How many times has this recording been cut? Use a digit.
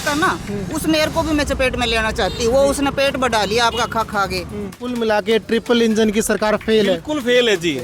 1